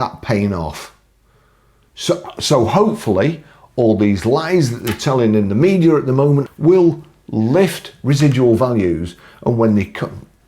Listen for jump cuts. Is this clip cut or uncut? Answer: cut